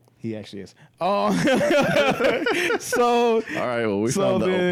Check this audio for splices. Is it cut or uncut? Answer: uncut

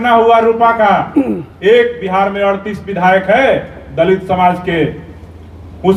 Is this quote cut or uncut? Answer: uncut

